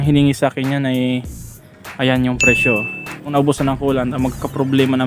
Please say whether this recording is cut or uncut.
cut